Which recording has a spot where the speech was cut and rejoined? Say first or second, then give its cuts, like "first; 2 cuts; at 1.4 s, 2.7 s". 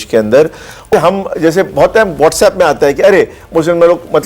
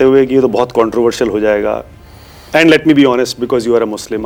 first; 1 cut; at 0.9 s